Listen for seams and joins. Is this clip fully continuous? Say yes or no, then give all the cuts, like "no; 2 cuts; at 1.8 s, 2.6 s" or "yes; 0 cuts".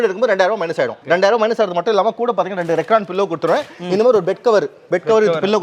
yes; 0 cuts